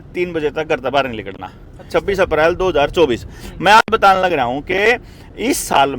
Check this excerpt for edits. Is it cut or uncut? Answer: cut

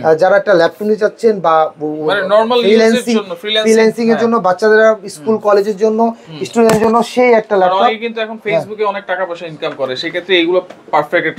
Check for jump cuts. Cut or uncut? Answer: uncut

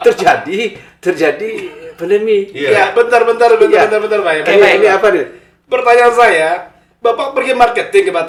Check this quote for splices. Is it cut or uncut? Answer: uncut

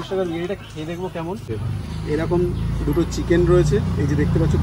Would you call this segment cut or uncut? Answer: cut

